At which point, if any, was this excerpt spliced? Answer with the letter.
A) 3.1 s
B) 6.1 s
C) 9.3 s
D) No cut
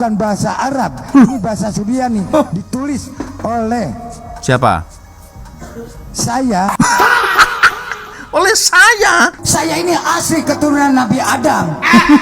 C